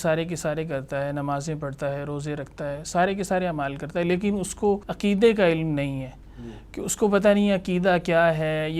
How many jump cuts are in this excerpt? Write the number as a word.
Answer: one